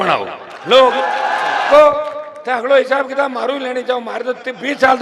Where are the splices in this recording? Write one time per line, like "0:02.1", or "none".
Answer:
0:01.7